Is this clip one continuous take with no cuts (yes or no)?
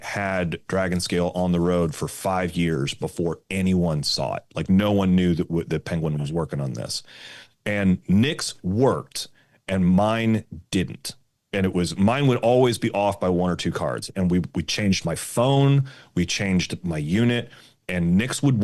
yes